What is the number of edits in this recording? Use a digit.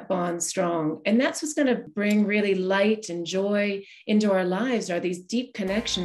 1